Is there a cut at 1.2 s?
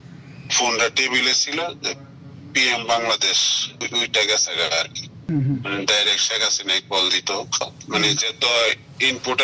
no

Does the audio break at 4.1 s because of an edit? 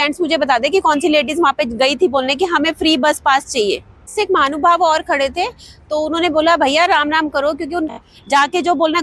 yes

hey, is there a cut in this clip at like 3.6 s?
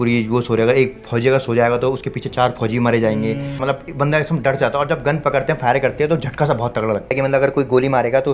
yes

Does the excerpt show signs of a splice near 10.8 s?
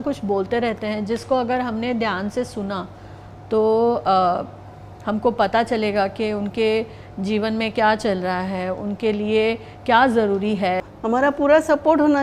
yes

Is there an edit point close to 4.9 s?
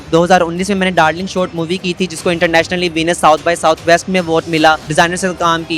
yes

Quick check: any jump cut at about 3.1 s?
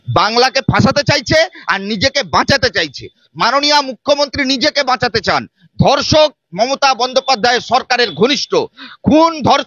no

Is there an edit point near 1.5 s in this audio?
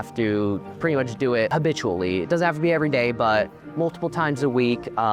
yes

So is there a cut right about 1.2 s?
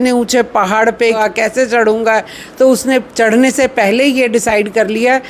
yes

